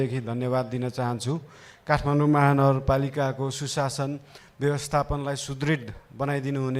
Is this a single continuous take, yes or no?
yes